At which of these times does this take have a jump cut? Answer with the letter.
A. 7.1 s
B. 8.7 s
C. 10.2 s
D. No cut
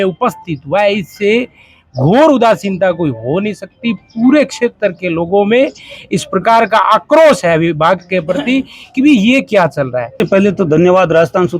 C